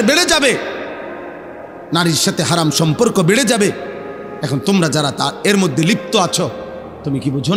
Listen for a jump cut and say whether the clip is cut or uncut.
uncut